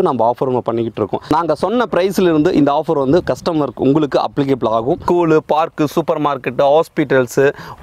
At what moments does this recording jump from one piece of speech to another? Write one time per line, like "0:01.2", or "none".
0:01.2
0:05.0